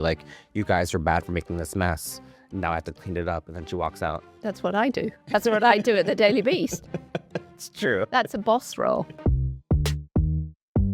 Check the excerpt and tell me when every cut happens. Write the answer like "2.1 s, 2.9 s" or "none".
9.1 s